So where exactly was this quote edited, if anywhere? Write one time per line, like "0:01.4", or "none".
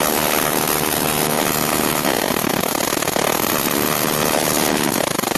0:03.9